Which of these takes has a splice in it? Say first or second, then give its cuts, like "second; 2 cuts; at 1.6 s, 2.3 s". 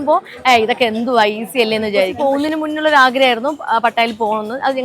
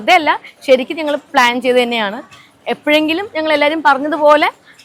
first; 1 cut; at 2.1 s